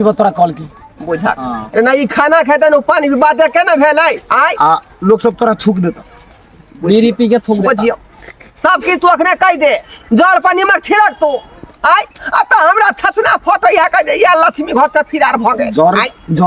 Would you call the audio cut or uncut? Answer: uncut